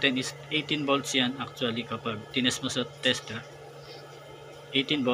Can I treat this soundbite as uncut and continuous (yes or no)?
yes